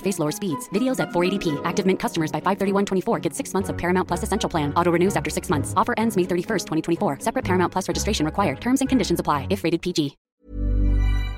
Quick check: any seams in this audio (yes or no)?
yes